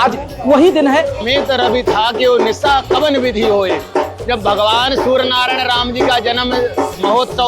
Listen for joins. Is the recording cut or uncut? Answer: cut